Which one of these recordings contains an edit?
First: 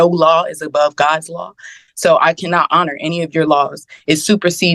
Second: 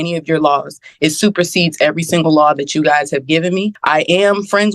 second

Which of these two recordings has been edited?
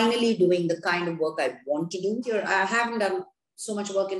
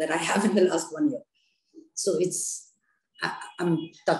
first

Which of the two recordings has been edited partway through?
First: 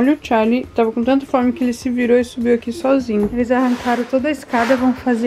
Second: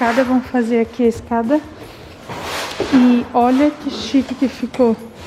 first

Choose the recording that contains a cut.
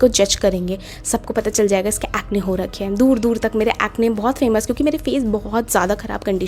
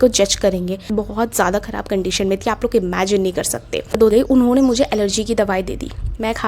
second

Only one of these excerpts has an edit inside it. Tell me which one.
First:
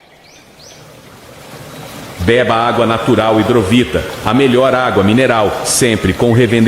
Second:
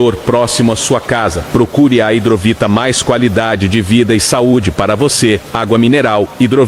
first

